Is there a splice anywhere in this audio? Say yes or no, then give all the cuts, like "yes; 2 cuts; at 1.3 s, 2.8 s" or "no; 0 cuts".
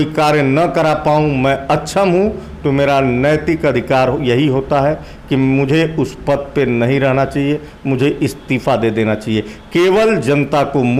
no; 0 cuts